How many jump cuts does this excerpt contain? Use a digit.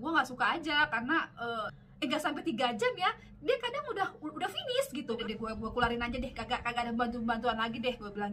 2